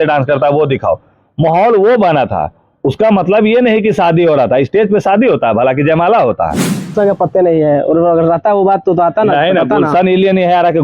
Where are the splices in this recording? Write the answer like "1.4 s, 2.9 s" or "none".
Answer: 6.9 s